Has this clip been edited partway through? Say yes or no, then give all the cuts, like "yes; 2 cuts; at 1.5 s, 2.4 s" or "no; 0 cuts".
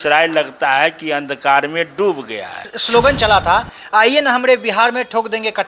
yes; 1 cut; at 2.7 s